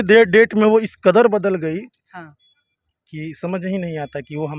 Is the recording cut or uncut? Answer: uncut